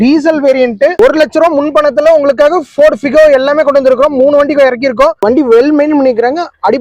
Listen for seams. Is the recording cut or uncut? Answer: cut